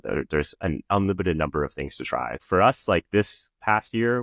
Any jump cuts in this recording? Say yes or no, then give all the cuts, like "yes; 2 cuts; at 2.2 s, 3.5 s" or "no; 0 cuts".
yes; 1 cut; at 2.4 s